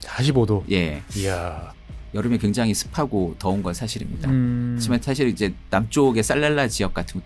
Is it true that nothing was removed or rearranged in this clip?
yes; 0 cuts

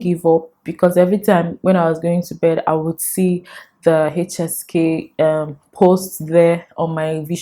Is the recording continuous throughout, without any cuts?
yes; 0 cuts

